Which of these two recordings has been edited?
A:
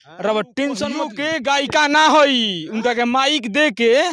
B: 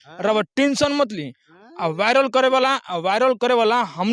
A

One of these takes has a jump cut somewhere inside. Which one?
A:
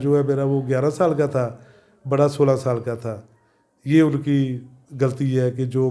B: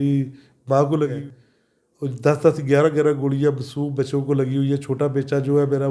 B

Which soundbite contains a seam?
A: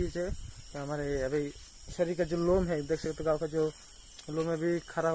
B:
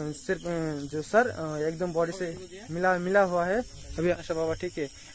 B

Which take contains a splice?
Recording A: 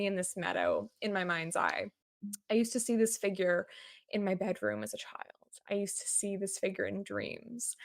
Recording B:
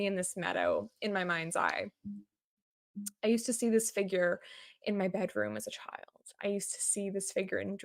A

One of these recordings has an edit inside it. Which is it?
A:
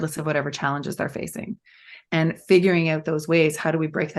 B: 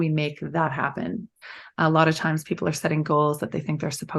B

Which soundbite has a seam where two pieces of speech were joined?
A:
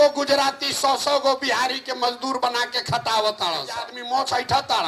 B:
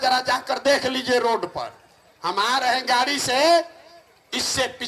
A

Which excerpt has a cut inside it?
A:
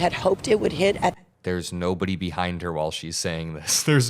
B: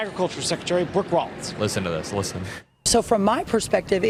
A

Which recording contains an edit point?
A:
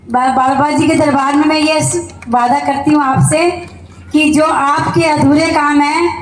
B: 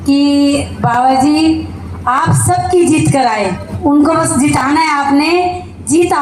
B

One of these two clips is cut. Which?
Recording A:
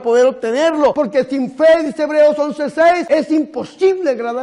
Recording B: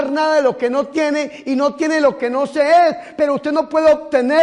A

